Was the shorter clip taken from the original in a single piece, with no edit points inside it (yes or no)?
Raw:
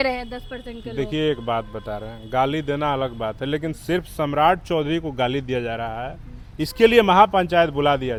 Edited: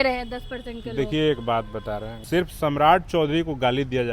no